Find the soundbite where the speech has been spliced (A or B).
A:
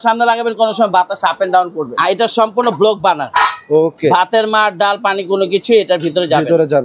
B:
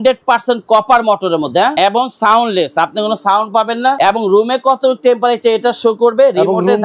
B